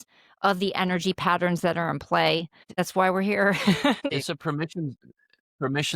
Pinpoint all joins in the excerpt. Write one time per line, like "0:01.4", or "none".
0:02.7
0:04.0